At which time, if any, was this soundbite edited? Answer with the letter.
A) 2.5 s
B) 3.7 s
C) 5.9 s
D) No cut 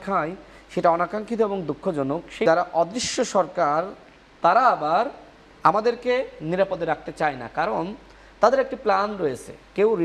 A